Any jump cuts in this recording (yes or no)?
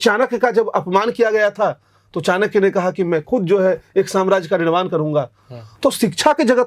no